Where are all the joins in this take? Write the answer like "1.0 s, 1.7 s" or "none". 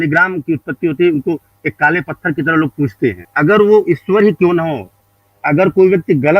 3.3 s